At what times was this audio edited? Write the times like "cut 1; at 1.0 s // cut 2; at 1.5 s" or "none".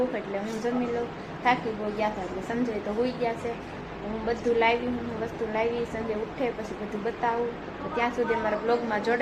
none